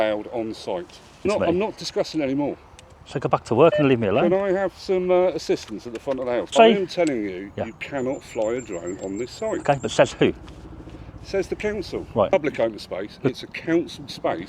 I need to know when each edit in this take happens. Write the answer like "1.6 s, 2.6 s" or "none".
1.3 s, 6.5 s, 12.3 s